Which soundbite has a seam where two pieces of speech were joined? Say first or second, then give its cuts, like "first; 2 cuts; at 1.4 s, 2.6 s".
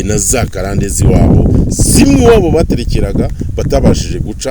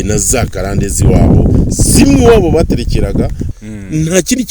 second; 1 cut; at 3.4 s